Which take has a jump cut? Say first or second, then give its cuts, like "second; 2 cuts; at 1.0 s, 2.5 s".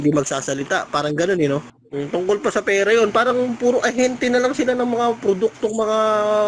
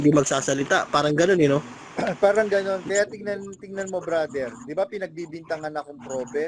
first; 1 cut; at 1.8 s